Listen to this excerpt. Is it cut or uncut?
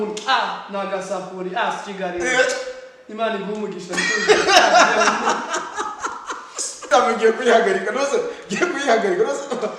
cut